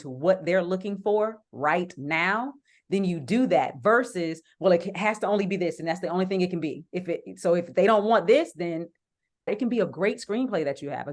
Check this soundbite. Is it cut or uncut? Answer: cut